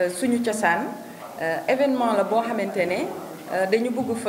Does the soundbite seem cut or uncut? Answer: uncut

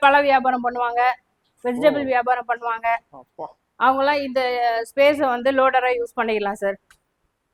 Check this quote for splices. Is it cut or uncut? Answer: uncut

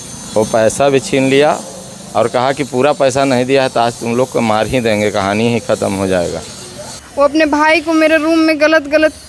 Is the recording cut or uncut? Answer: cut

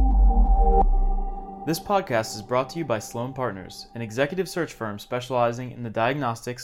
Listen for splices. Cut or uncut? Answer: cut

